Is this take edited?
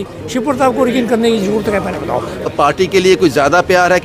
yes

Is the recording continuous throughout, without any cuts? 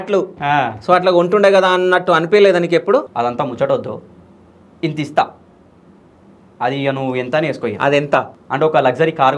no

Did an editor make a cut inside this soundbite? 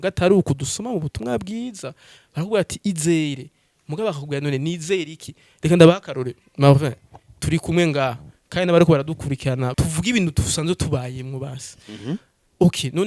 yes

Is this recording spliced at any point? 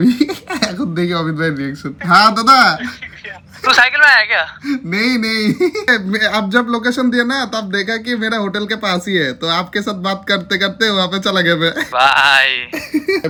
no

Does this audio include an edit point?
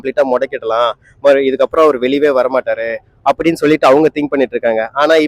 no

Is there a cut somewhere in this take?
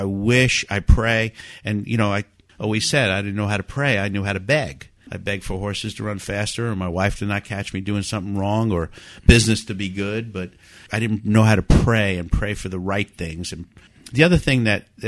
yes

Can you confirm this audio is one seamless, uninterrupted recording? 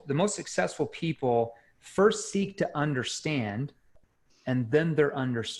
yes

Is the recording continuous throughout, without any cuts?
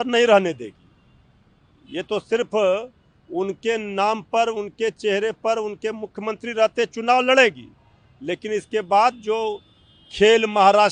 yes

